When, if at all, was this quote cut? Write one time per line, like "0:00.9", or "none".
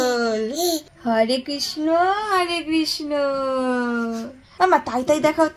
0:00.9
0:04.5